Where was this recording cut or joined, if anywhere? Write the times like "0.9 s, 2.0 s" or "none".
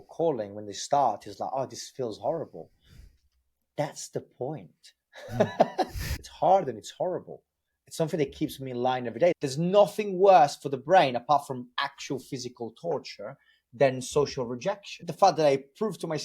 6.1 s, 9.4 s, 15.0 s